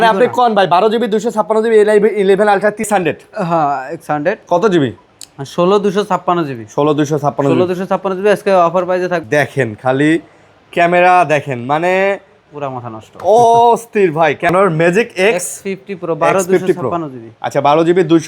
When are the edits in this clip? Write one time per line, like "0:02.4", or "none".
0:02.9
0:09.2
0:14.5